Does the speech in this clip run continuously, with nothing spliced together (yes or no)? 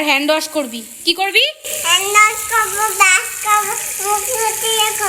yes